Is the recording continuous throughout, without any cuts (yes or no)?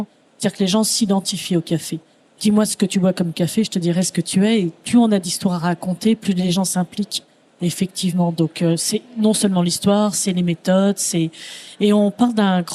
yes